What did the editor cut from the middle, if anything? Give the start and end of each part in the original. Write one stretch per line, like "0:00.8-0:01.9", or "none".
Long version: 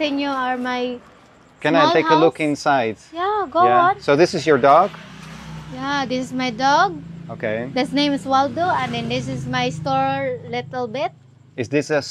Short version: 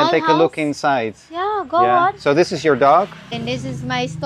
0:05.1-0:09.0